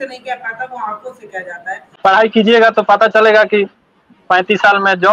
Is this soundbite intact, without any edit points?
no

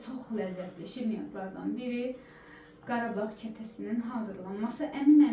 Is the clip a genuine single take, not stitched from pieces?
yes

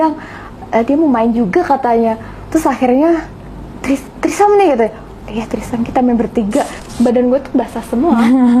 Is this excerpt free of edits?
no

